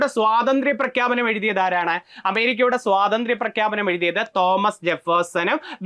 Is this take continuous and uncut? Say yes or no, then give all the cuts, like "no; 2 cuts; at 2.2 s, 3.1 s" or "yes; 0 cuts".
yes; 0 cuts